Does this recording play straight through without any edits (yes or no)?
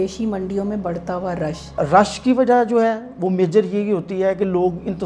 no